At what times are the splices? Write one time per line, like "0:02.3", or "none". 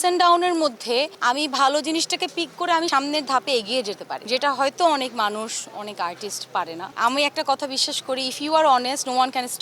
0:01.1
0:02.9
0:04.1
0:06.8